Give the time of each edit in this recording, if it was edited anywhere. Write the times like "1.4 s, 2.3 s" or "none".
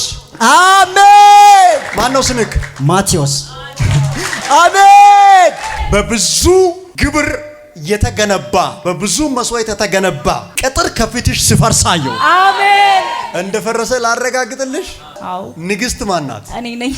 1.9 s, 5.7 s, 6.9 s, 8.8 s, 10.5 s, 13.3 s